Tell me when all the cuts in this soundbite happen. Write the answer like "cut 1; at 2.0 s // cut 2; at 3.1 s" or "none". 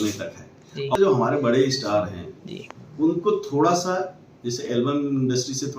cut 1; at 0.9 s